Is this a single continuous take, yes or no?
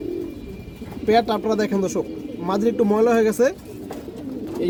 yes